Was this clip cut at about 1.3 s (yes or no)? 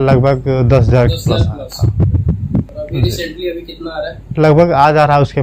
no